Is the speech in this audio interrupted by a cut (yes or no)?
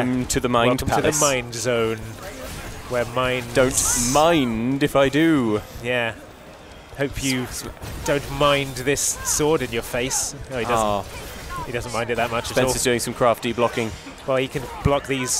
no